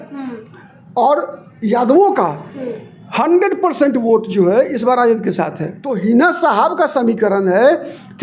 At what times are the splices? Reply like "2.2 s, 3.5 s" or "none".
5.9 s